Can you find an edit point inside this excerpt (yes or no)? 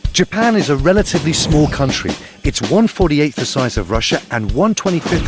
yes